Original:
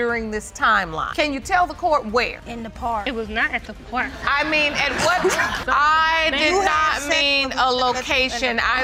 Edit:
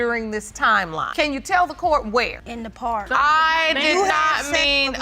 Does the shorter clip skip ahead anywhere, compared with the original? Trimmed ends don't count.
yes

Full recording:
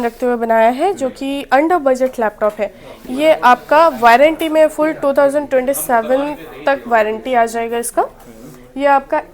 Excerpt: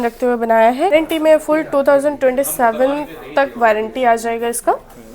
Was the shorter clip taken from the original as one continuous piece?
no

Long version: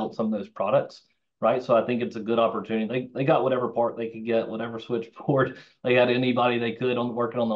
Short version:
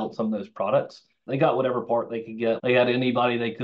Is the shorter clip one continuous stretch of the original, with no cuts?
no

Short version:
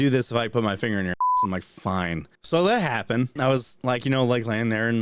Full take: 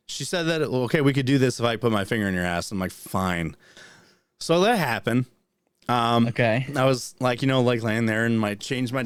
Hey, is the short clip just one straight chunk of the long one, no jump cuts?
no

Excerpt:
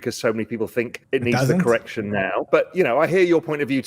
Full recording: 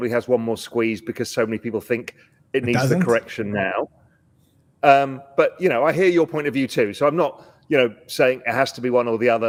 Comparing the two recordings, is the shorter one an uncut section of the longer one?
no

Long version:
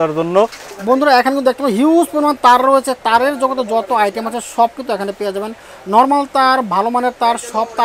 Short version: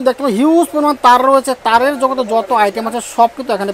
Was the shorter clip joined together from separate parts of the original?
no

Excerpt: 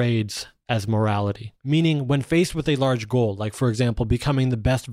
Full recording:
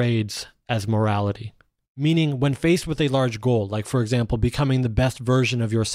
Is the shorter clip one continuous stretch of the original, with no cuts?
no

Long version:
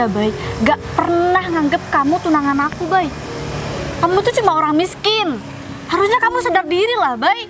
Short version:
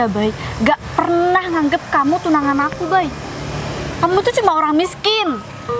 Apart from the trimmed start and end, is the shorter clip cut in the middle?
no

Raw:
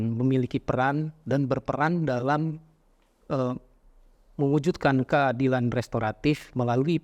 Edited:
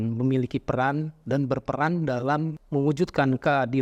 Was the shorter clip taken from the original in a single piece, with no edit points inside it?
no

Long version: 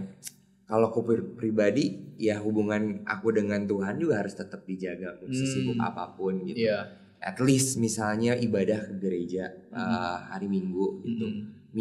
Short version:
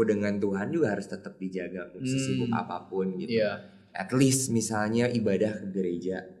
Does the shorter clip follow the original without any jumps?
yes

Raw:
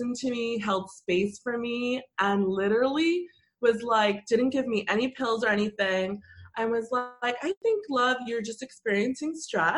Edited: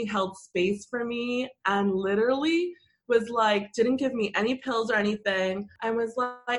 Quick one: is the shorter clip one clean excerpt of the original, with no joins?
no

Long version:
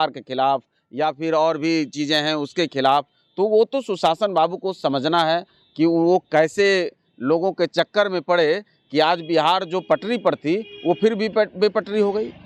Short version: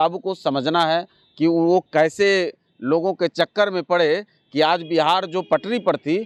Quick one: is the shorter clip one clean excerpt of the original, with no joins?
yes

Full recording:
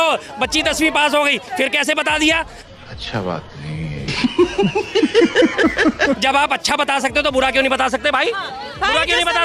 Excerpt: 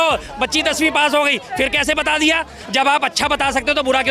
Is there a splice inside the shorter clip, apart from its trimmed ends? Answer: yes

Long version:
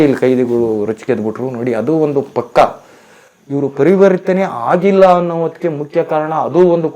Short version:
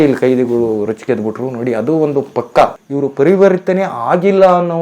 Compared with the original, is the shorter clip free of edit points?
no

